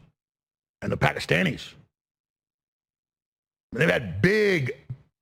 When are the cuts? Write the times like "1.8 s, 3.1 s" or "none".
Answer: none